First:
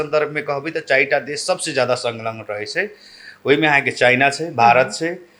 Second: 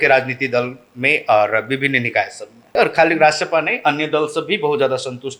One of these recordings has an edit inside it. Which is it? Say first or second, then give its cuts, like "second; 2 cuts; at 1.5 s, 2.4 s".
second; 1 cut; at 2.7 s